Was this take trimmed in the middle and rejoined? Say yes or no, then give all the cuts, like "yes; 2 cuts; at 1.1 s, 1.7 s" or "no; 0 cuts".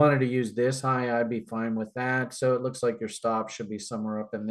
no; 0 cuts